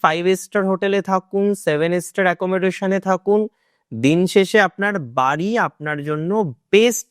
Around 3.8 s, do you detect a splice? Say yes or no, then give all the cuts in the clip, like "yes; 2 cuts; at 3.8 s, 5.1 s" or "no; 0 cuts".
no; 0 cuts